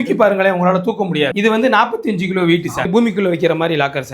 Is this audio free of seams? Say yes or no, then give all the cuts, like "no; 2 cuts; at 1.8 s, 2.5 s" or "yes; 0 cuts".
no; 2 cuts; at 1.3 s, 2.9 s